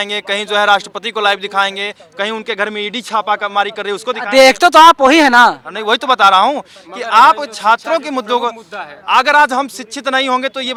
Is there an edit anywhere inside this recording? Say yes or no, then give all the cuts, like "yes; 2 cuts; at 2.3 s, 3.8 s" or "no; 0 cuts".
no; 0 cuts